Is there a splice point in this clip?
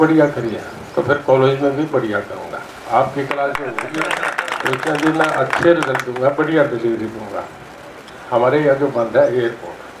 no; 0 cuts

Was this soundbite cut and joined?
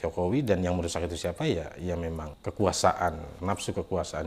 yes; 2 cuts; at 2.3 s, 3.3 s

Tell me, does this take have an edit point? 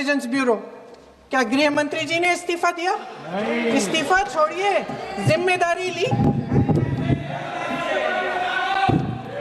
no; 0 cuts

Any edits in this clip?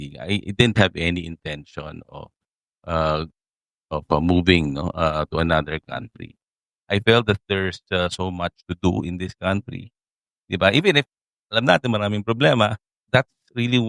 yes; 1 cut; at 12.9 s

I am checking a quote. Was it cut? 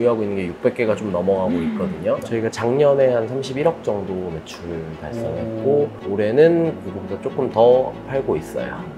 yes; 2 cuts; at 2.2 s, 6.0 s

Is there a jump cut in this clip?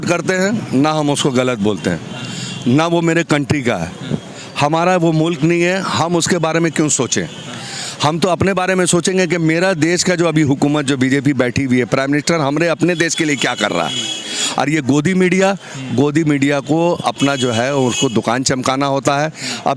no; 0 cuts

